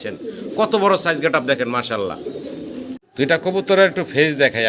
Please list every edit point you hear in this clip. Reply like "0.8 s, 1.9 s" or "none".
3.0 s